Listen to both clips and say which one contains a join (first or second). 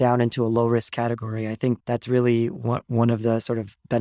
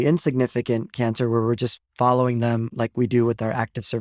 second